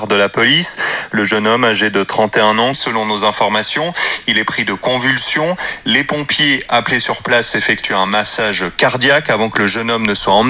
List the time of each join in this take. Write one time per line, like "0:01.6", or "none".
0:02.8